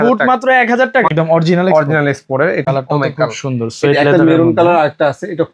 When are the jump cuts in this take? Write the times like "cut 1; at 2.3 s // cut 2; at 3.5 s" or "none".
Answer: cut 1; at 1.1 s // cut 2; at 2.7 s

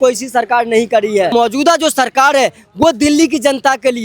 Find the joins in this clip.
cut 1; at 1.3 s

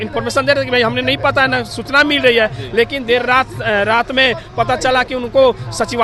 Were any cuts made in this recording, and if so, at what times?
none

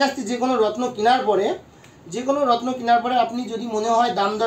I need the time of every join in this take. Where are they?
none

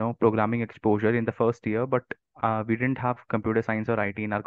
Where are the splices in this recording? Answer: none

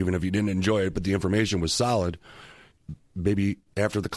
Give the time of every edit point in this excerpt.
none

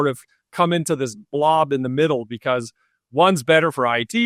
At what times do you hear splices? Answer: none

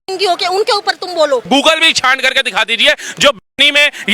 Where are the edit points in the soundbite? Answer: cut 1; at 1.4 s

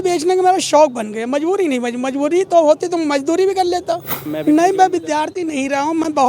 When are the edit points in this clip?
cut 1; at 4.2 s

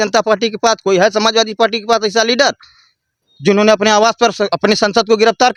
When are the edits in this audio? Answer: none

